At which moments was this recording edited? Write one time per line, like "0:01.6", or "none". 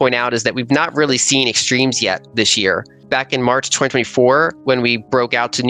0:03.0